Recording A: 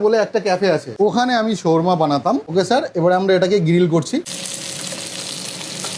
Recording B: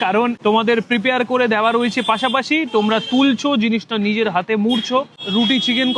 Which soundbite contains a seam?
A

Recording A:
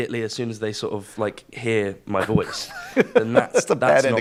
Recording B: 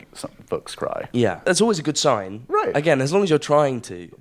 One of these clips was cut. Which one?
B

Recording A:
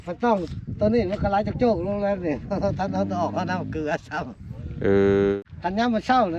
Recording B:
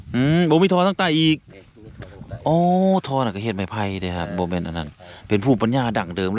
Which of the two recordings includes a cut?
A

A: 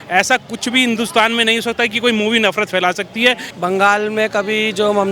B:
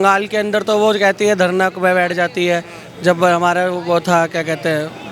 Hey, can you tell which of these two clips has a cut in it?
A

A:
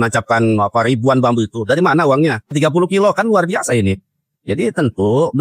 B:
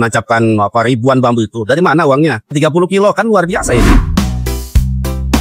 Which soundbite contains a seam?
B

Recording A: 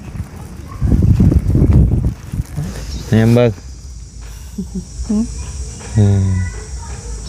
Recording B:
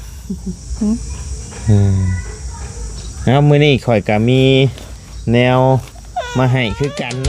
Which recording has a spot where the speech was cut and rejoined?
A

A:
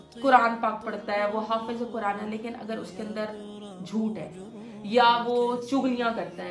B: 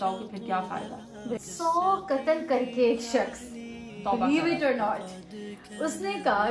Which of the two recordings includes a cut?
B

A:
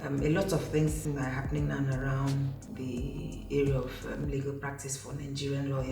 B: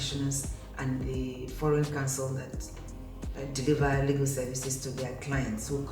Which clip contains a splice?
A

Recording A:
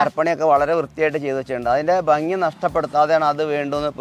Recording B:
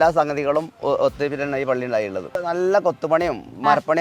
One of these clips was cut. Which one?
B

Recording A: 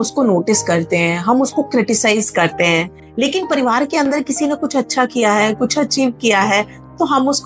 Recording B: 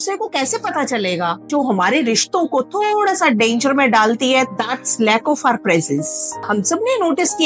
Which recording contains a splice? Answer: B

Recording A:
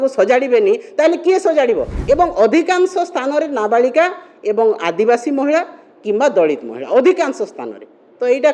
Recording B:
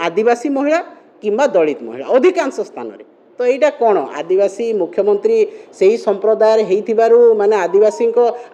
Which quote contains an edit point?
A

